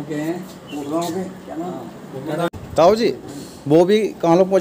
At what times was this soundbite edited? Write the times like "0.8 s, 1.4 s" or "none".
2.5 s